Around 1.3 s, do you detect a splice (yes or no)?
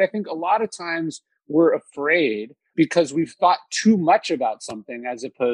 no